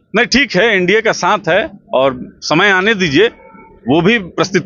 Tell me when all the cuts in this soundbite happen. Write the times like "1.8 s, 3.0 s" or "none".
none